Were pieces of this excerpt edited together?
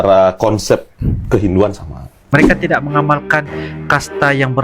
yes; 1 cut; at 2.3 s

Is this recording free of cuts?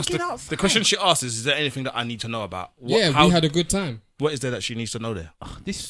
no; 1 cut; at 4.0 s

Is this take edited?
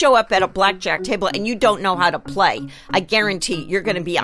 yes; 1 cut; at 1.0 s

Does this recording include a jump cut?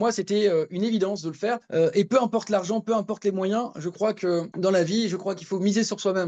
yes; 2 cuts; at 1.6 s, 4.5 s

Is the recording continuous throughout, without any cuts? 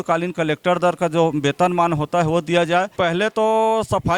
no; 1 cut; at 2.9 s

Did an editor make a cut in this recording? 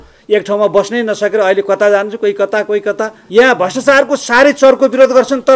yes; 1 cut; at 3.1 s

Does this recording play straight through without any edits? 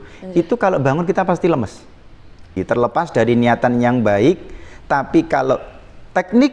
no; 1 cut; at 2.6 s

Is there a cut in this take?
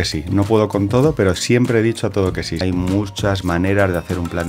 yes; 1 cut; at 2.6 s

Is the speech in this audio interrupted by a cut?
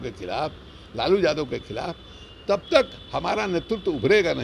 no; 0 cuts

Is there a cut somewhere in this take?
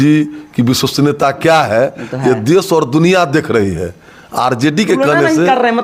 no; 0 cuts

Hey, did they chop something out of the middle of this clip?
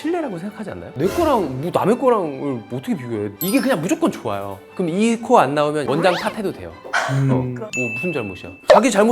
yes; 3 cuts; at 3.3 s, 4.6 s, 7.5 s

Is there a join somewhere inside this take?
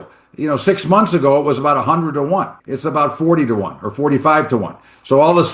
yes; 1 cut; at 2.5 s

